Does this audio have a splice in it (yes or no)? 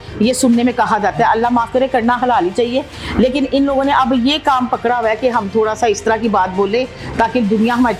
no